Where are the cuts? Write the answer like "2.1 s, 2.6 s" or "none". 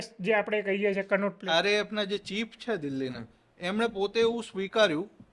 1.4 s